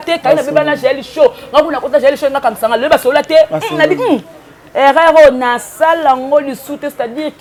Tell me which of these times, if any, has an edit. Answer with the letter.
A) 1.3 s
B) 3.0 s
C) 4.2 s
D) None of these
D